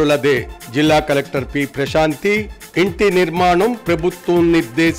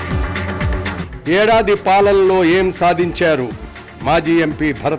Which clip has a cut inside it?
second; 1 cut; at 0.9 s

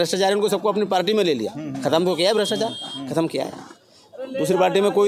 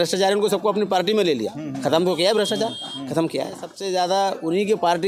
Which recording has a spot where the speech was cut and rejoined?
second; 1 cut; at 3.7 s

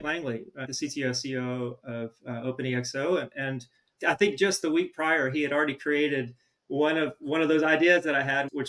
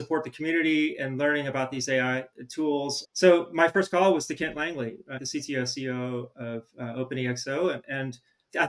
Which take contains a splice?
second; 1 cut; at 3.0 s

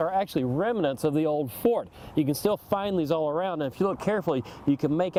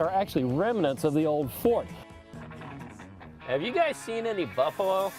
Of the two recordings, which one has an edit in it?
second; 1 cut; at 2.0 s

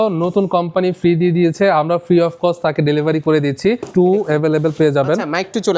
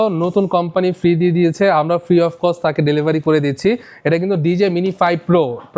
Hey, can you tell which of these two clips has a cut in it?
first; 1 cut; at 3.8 s

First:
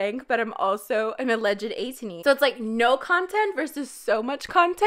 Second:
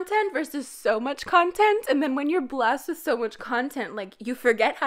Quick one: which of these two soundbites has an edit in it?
first; 1 cut; at 2.1 s

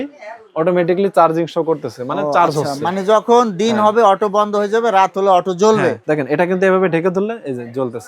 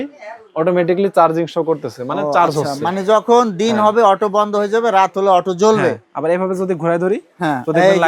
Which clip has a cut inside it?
first; 1 cut; at 6.0 s

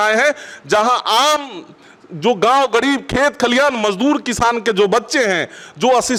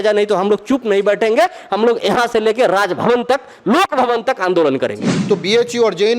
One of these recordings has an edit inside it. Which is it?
second; 1 cut; at 5.1 s

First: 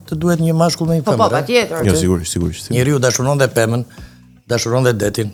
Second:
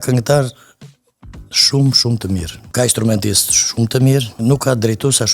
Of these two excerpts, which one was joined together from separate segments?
second; 2 cuts; at 2.6 s, 4.3 s

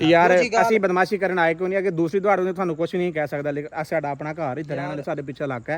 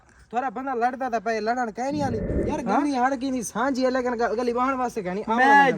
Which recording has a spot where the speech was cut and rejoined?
second; 1 cut; at 2.3 s

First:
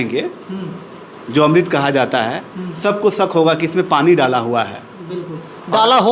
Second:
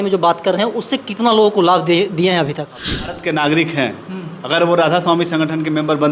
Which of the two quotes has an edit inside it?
second; 1 cut; at 2.7 s

